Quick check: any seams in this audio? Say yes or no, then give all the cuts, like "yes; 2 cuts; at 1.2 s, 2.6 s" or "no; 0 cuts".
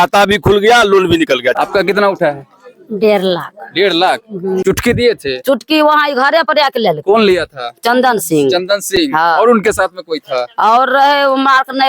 yes; 2 cuts; at 1.5 s, 4.6 s